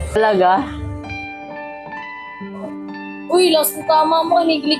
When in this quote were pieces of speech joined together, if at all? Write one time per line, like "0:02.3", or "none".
none